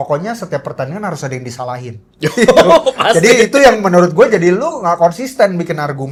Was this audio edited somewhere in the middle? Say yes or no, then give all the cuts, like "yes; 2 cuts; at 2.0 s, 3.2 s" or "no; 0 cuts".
no; 0 cuts